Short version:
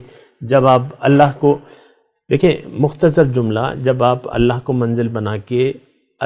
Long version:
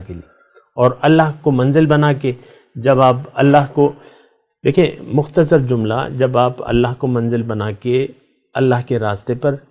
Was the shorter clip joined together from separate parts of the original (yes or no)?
no